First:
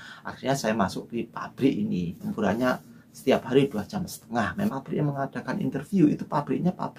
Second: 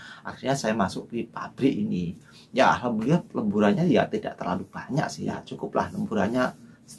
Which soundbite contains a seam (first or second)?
first